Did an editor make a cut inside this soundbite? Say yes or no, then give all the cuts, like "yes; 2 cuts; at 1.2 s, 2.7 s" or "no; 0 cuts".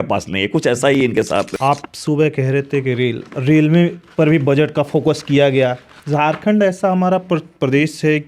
yes; 2 cuts; at 1.5 s, 5.9 s